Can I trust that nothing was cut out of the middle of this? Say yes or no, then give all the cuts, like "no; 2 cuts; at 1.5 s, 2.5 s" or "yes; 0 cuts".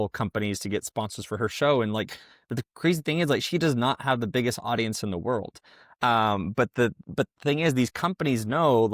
yes; 0 cuts